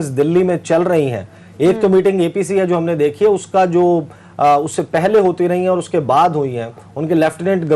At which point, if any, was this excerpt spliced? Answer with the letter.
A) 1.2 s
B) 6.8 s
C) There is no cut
C